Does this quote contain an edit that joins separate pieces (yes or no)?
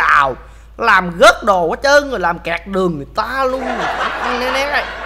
no